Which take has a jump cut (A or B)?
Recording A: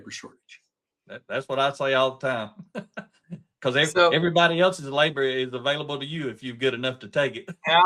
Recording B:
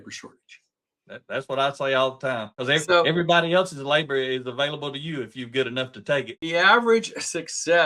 B